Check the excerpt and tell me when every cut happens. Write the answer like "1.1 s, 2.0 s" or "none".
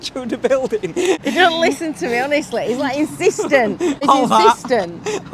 1.2 s, 4.0 s